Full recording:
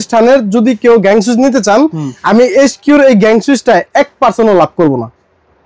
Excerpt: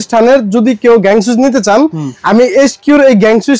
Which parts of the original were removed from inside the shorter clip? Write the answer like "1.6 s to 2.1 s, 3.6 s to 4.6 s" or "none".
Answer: none